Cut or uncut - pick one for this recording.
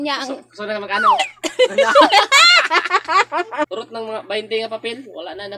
cut